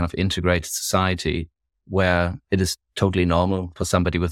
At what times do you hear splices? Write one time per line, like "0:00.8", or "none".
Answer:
none